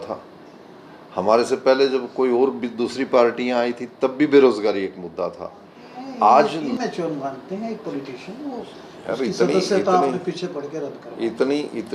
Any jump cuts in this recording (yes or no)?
yes